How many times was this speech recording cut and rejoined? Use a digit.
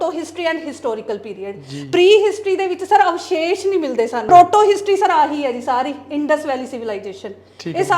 1